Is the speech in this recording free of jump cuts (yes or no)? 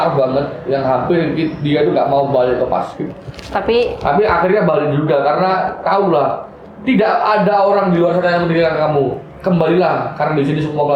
yes